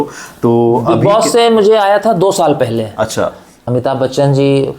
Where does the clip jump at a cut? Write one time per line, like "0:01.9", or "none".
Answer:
0:03.7